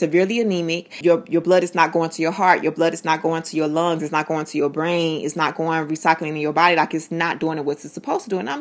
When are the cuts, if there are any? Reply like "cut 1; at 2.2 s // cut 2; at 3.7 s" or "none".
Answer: cut 1; at 0.9 s